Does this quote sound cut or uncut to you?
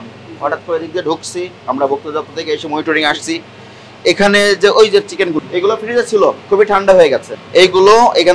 cut